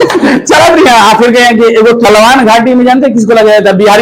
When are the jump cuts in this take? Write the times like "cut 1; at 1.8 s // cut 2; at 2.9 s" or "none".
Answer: cut 1; at 2.1 s